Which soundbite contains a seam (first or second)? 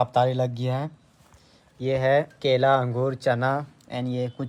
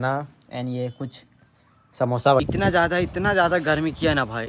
second